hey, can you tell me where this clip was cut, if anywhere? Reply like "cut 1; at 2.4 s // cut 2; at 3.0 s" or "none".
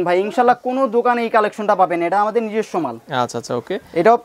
none